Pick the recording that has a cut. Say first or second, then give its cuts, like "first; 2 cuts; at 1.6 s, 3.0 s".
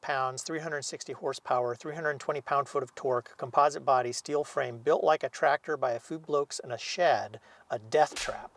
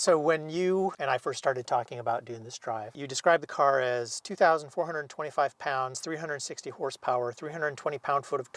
second; 2 cuts; at 1.0 s, 3.1 s